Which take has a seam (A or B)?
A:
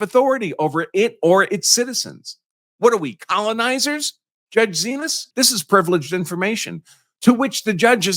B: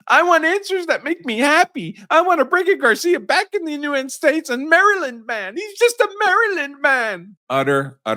A